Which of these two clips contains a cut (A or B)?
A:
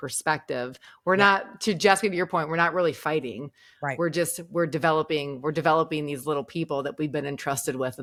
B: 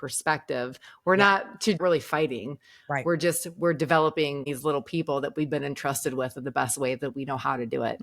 B